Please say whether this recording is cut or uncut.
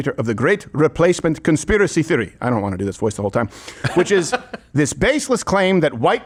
uncut